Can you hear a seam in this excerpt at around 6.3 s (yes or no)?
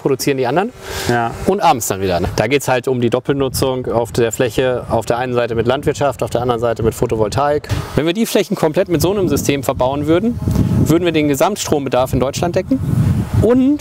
no